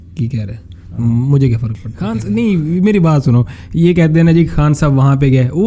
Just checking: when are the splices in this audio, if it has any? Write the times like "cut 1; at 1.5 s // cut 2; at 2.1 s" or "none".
cut 1; at 2.3 s